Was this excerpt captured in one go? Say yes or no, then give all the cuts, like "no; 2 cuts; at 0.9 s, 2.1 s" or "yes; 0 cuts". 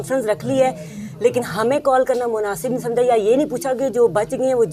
yes; 0 cuts